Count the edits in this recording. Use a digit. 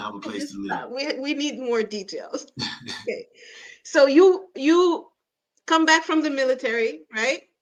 0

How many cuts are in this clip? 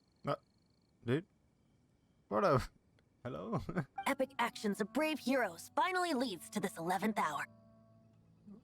1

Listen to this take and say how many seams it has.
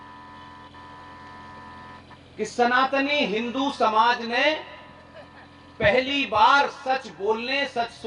0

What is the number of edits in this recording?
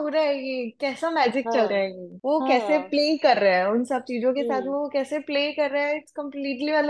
0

